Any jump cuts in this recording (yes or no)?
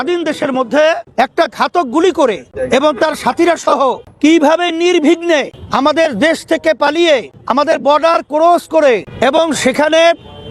yes